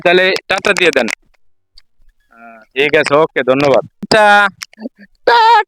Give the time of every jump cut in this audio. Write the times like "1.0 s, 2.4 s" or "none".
4.1 s